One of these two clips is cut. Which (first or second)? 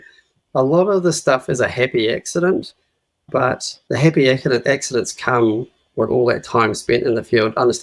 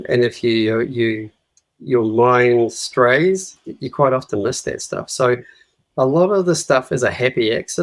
first